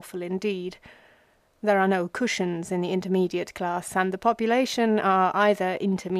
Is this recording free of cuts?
yes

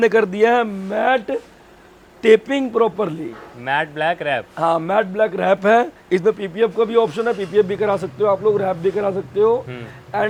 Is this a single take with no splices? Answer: yes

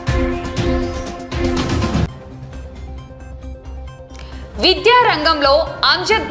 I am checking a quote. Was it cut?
yes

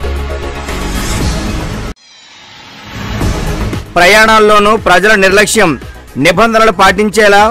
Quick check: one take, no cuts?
yes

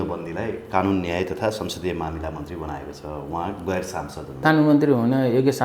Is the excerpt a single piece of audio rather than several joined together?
no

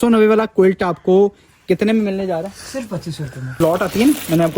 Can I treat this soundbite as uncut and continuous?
no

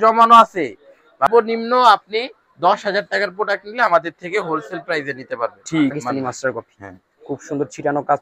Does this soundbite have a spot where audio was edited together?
yes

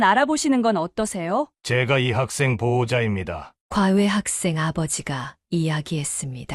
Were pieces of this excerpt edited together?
yes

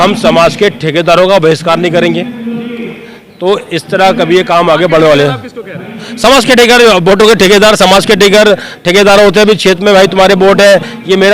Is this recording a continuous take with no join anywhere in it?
yes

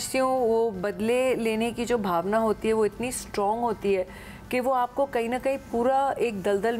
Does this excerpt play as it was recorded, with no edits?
yes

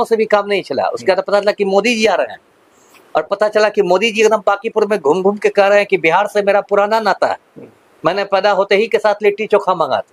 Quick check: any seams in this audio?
no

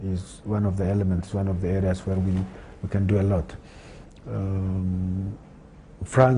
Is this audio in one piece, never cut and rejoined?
yes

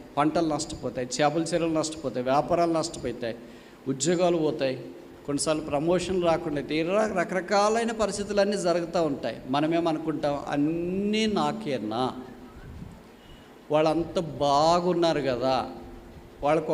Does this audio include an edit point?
no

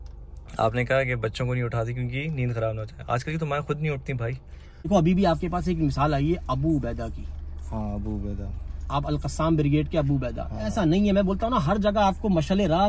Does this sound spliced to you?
yes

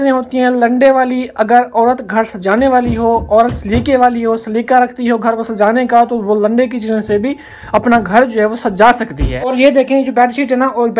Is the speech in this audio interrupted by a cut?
yes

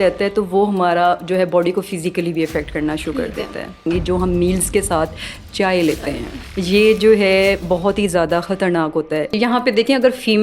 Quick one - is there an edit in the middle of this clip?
yes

